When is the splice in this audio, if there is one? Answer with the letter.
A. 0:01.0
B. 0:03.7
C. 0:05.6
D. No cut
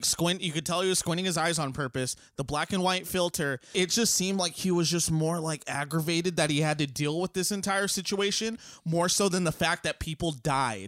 B